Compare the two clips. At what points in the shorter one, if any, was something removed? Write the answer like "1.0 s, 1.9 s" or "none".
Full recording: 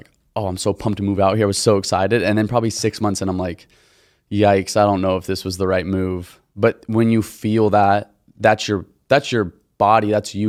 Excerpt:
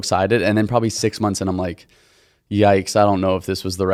none